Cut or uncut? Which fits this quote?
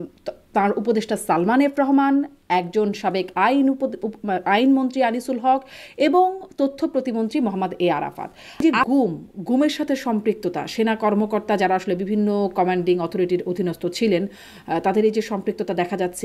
cut